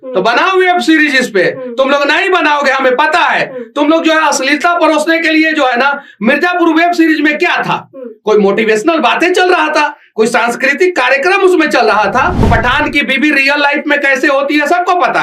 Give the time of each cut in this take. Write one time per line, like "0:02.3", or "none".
0:12.5